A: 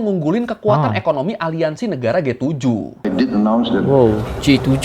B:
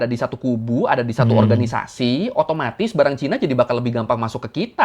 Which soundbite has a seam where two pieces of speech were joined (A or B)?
A